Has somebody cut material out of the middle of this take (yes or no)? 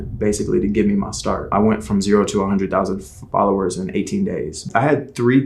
yes